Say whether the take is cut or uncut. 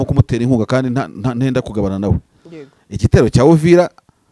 uncut